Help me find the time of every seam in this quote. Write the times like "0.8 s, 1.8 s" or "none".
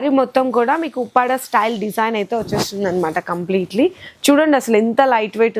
none